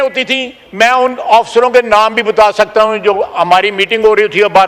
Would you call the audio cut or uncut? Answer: uncut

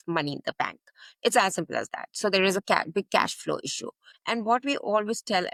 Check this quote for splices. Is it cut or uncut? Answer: uncut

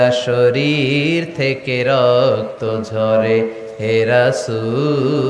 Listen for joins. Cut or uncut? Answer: uncut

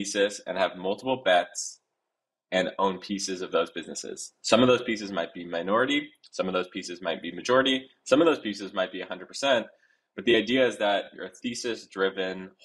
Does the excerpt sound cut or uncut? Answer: cut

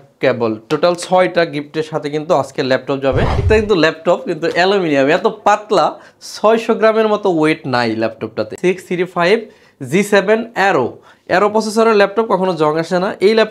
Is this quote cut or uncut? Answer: cut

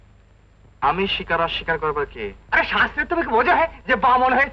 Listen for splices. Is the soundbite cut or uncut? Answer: cut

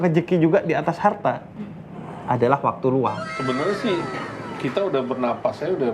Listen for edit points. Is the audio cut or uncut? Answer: cut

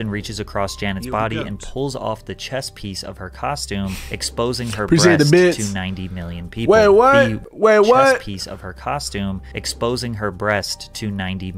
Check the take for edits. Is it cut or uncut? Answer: uncut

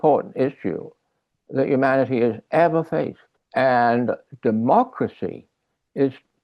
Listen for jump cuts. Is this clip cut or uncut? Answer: uncut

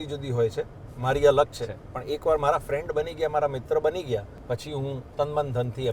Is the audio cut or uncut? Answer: cut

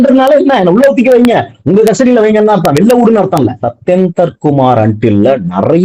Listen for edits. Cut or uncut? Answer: cut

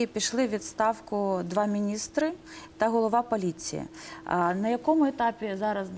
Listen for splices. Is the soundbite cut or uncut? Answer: uncut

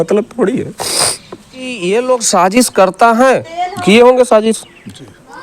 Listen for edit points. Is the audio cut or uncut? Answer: cut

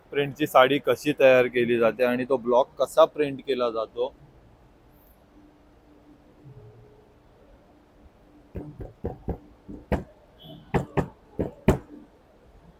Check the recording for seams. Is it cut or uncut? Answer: uncut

